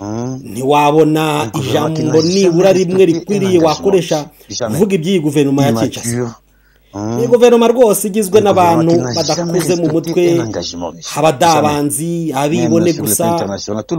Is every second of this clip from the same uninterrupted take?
yes; 0 cuts

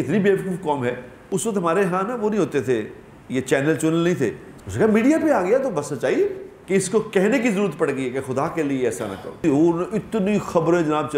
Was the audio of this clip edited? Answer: yes; 4 cuts; at 1.1 s, 4.5 s, 6.5 s, 9.4 s

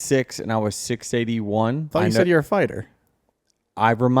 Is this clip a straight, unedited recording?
no; 1 cut; at 1.9 s

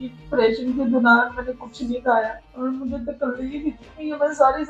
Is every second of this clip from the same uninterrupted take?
no; 1 cut; at 2.4 s

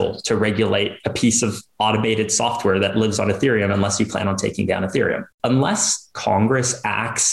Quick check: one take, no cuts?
no; 1 cut; at 5.3 s

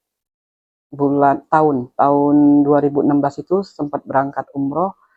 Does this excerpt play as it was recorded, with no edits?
yes; 0 cuts

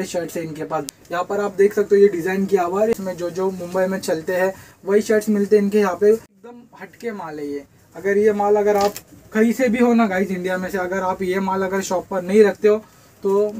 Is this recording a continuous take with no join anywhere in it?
no; 3 cuts; at 0.9 s, 2.9 s, 6.4 s

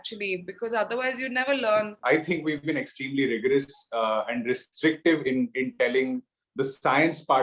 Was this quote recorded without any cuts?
no; 1 cut; at 2.0 s

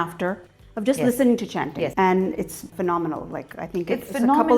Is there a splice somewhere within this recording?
yes; 2 cuts; at 1.9 s, 2.7 s

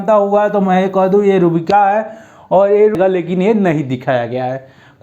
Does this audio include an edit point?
yes; 1 cut; at 2.9 s

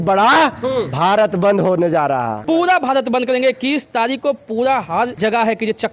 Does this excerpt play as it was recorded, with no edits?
no; 2 cuts; at 2.4 s, 5.1 s

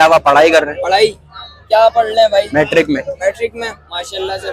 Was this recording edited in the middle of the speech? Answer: no; 0 cuts

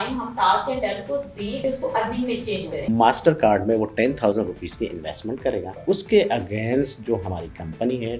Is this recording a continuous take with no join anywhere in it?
no; 3 cuts; at 1.6 s, 2.9 s, 5.8 s

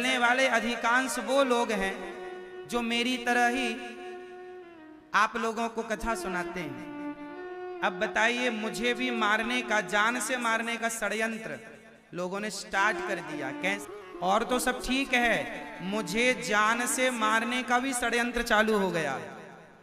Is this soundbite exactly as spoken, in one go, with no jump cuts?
no; 2 cuts; at 7.4 s, 13.8 s

